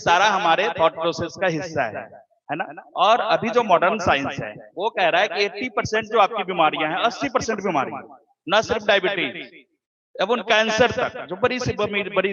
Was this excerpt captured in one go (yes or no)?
yes